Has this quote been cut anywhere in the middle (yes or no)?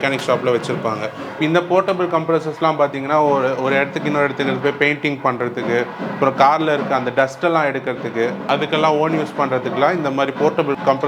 no